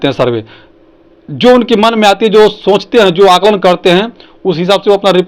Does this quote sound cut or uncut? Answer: uncut